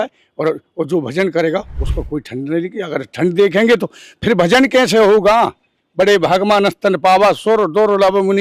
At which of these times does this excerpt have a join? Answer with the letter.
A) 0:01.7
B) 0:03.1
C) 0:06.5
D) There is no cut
D